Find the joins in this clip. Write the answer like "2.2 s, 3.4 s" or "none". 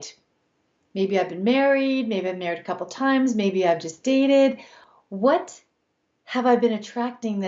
4.7 s